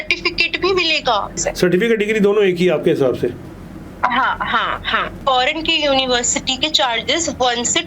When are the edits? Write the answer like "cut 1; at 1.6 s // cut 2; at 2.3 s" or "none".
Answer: cut 1; at 1.3 s // cut 2; at 5.1 s